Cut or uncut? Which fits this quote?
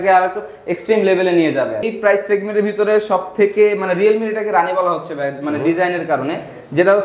cut